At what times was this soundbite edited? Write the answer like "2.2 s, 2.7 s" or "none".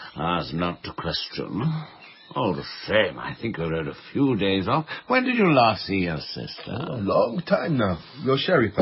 5.3 s

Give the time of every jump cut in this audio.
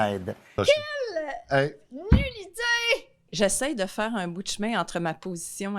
3.3 s

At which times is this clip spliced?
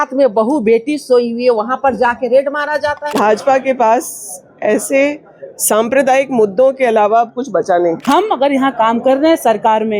3.1 s, 8.0 s

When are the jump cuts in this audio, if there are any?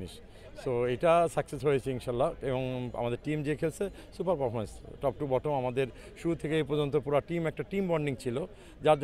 none

